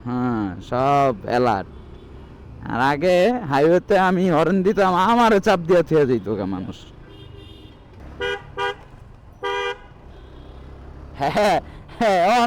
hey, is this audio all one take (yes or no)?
no